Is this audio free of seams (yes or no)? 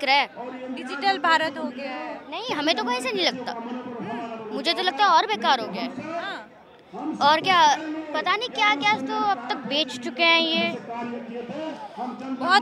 yes